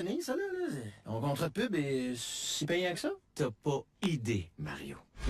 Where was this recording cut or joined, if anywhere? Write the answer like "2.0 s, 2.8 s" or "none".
none